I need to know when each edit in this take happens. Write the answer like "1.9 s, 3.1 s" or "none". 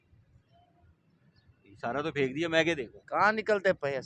2.9 s